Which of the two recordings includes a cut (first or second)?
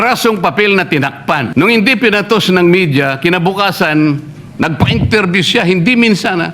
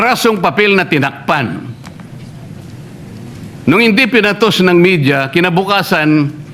first